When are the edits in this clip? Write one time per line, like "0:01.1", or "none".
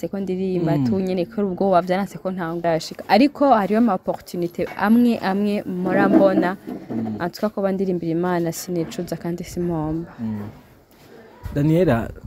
0:02.6